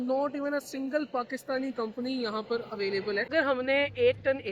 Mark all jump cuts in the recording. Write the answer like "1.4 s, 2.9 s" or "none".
3.3 s

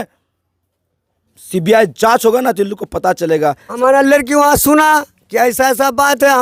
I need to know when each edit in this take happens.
3.7 s

